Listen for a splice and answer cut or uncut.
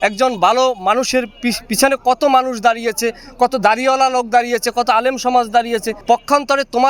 cut